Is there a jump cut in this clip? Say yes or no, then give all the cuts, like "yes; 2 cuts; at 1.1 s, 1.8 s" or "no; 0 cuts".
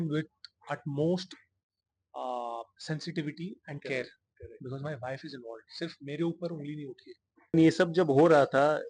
yes; 1 cut; at 7.5 s